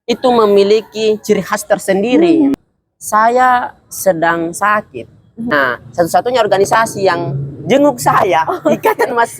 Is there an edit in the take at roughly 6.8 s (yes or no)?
no